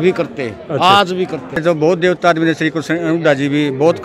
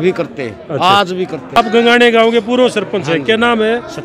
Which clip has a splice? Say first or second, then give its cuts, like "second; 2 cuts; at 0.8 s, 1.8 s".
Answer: first; 1 cut; at 1.6 s